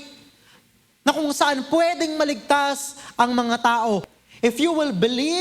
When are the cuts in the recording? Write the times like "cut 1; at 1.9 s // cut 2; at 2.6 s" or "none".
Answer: cut 1; at 4.1 s